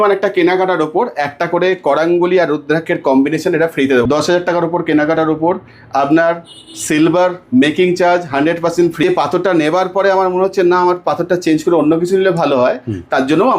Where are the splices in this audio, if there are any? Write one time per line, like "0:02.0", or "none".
0:04.0
0:09.0